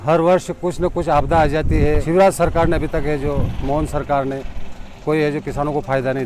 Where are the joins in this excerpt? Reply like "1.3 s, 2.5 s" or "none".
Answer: 2.0 s